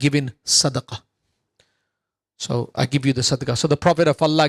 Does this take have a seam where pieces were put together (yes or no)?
no